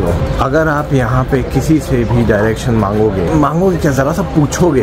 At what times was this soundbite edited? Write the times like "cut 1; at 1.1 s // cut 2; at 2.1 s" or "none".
none